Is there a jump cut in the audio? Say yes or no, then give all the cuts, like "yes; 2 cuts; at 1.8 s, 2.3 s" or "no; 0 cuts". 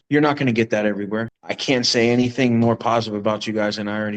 yes; 1 cut; at 1.4 s